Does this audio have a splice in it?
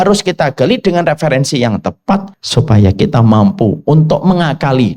yes; 1 cut; at 2.4 s

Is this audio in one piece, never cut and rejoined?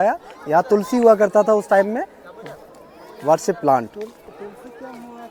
yes; 0 cuts

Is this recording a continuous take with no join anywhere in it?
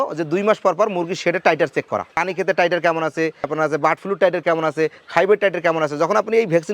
no; 1 cut; at 2.2 s

